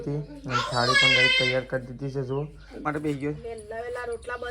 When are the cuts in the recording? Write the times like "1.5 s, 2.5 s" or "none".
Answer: 2.9 s